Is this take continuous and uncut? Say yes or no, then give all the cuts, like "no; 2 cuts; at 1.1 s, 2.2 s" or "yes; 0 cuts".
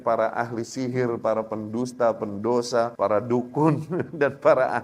no; 1 cut; at 2.9 s